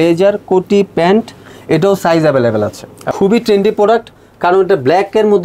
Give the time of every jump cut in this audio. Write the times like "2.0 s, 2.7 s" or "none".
3.1 s